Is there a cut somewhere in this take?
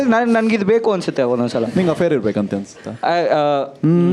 yes; 1 cut; at 1.7 s

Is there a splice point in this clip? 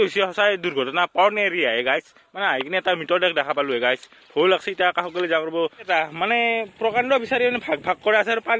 yes; 1 cut; at 5.9 s

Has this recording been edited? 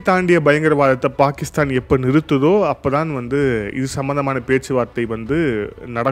no; 0 cuts

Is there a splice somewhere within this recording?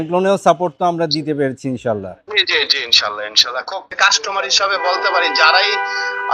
yes; 2 cuts; at 2.2 s, 3.9 s

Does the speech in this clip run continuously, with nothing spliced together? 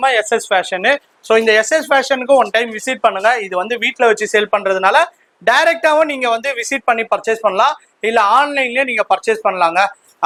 yes; 0 cuts

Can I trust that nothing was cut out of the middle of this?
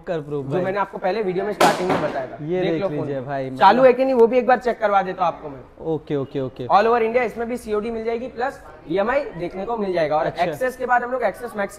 yes; 0 cuts

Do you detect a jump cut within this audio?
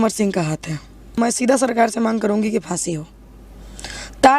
yes; 1 cut; at 1.2 s

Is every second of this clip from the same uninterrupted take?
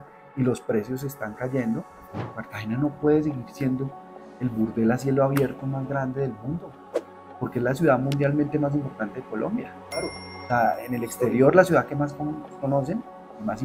no; 1 cut; at 2.4 s

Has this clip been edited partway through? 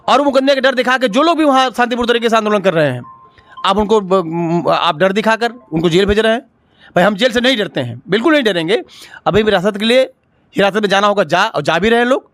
no; 0 cuts

